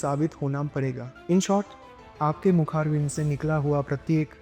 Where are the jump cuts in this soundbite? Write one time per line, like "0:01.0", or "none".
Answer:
0:01.1